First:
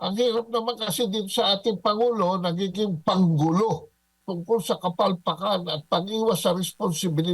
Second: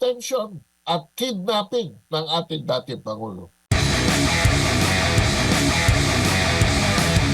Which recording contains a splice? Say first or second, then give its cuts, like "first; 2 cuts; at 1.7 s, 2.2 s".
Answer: first; 1 cut; at 4.2 s